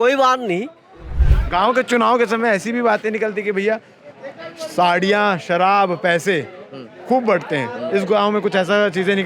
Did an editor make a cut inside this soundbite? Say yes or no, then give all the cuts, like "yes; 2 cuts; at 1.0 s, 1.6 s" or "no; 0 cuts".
yes; 1 cut; at 1.1 s